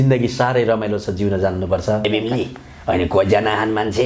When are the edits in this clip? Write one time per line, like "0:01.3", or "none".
0:02.1